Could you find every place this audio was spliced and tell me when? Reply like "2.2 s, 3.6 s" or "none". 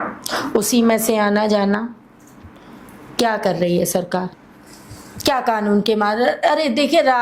4.3 s